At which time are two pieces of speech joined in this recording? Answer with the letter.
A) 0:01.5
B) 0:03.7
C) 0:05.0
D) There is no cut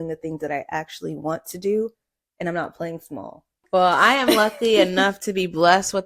B